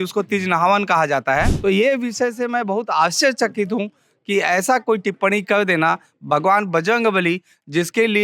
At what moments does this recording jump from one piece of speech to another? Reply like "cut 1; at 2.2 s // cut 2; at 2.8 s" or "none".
cut 1; at 1.5 s